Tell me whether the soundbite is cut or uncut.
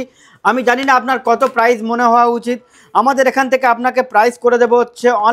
uncut